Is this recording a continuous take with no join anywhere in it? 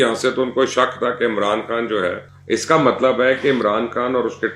no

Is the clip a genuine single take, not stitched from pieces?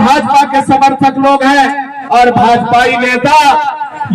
yes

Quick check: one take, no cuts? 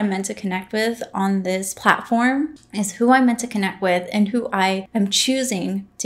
no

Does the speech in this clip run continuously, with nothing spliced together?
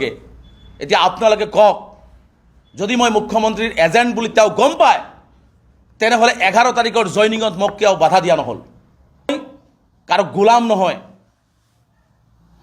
no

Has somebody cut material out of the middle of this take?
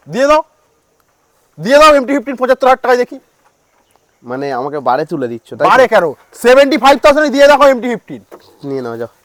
no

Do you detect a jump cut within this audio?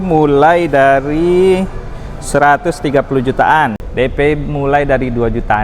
yes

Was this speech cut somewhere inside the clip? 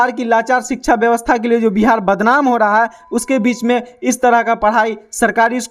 no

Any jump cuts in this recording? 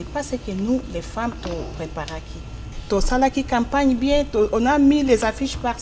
yes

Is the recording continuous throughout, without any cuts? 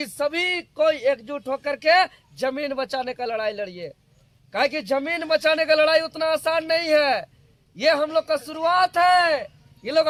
yes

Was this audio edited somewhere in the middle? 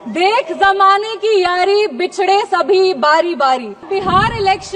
yes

